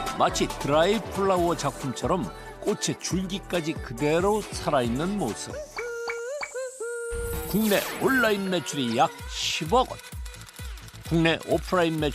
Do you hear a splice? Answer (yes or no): yes